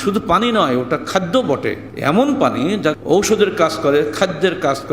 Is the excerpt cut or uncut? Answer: cut